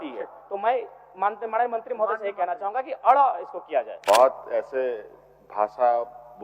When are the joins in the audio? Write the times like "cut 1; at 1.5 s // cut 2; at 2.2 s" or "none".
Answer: cut 1; at 3.9 s